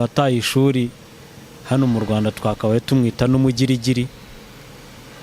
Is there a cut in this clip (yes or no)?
no